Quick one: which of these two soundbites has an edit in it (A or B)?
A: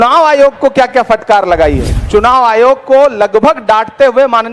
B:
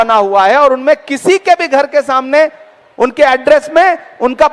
A